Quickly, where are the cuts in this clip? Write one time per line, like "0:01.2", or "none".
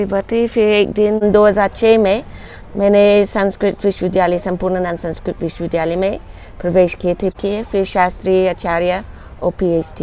0:01.2
0:07.4